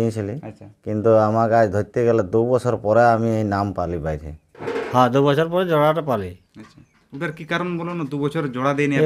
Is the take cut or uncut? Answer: cut